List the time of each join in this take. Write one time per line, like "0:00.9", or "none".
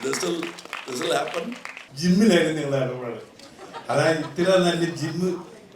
0:01.8